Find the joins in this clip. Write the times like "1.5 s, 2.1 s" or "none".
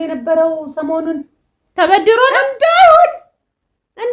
none